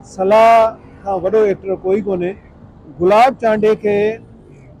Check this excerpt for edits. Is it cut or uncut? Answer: uncut